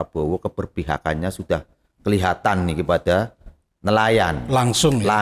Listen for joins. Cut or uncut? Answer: uncut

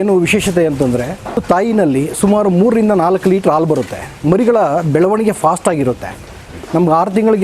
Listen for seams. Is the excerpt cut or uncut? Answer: cut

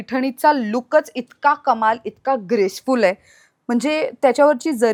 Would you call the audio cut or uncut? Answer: uncut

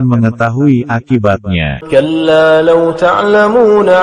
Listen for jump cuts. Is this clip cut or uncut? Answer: cut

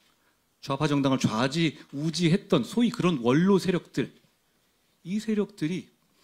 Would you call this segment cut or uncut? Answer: uncut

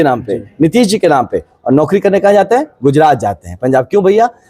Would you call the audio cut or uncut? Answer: uncut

